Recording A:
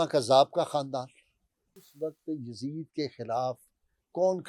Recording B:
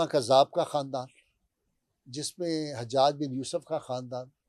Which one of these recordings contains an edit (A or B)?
A